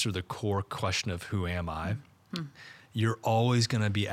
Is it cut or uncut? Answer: cut